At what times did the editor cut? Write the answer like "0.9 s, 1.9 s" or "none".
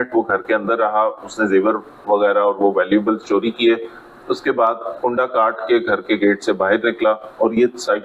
none